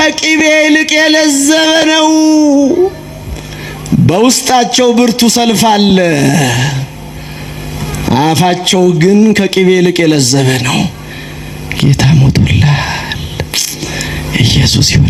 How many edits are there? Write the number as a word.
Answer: zero